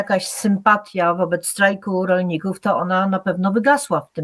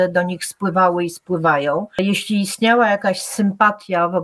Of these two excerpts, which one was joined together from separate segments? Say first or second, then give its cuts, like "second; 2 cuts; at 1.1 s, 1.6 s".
second; 1 cut; at 2.0 s